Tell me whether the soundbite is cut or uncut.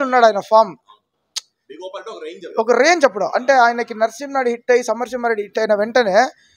uncut